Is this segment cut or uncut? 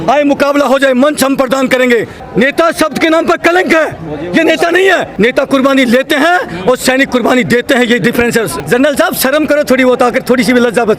cut